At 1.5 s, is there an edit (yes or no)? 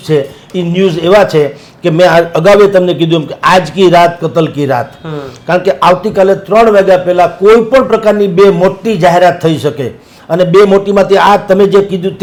no